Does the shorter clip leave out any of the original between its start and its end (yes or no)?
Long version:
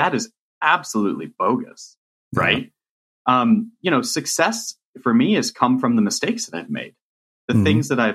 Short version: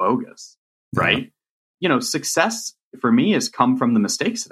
yes